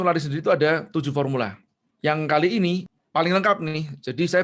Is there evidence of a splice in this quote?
yes; 1 cut; at 2.9 s

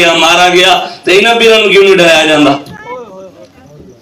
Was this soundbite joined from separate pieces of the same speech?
no; 0 cuts

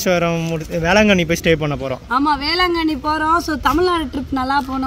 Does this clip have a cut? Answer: no; 0 cuts

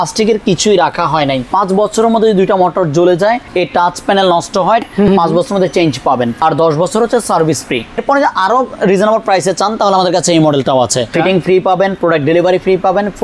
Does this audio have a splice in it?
yes; 6 cuts; at 1.5 s, 3.5 s, 4.8 s, 6.4 s, 8.0 s, 11.1 s

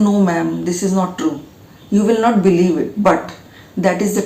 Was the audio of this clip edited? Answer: no; 0 cuts

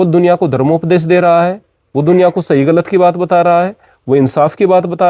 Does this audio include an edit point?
no; 0 cuts

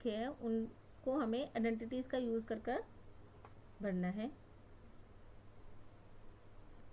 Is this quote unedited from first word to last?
no; 1 cut; at 5.6 s

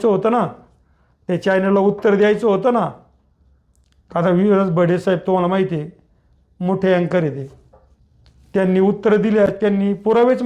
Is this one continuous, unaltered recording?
yes; 0 cuts

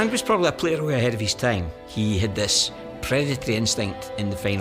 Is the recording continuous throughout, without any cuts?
no; 1 cut; at 1.8 s

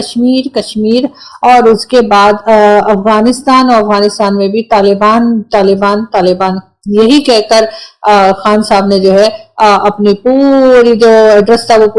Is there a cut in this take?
no; 0 cuts

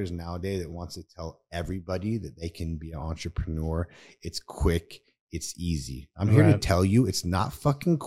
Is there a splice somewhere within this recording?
no; 0 cuts

